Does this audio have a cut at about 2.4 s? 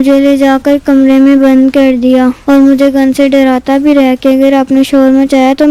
yes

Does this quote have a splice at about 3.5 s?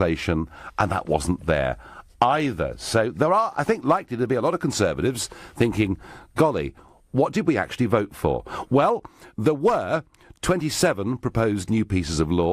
yes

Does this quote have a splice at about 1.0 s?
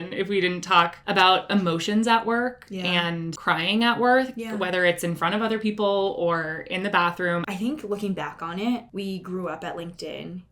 yes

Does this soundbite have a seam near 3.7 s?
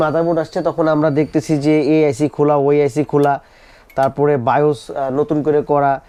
no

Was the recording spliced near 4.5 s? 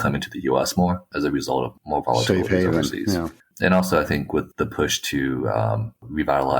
yes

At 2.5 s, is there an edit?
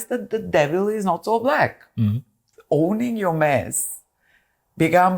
yes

